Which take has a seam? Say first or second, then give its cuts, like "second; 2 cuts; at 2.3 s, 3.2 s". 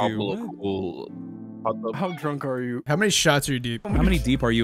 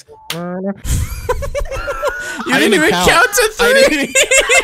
first; 1 cut; at 1.2 s